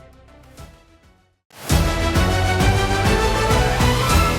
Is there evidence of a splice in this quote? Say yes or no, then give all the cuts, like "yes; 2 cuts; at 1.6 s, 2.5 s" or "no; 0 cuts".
yes; 1 cut; at 1.8 s